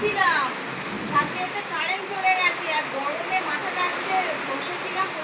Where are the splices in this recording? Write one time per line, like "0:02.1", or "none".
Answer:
none